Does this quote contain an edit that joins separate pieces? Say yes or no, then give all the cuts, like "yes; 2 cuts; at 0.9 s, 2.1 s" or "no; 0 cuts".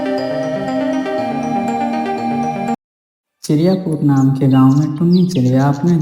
yes; 1 cut; at 2.9 s